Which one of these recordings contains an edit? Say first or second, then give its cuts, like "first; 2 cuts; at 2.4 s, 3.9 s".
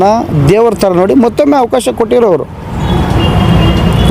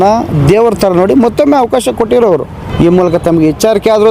second; 1 cut; at 2.6 s